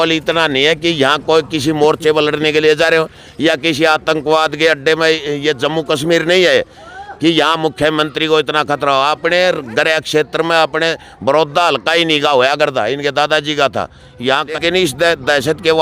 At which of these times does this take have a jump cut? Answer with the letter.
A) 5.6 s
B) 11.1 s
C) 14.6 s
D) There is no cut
C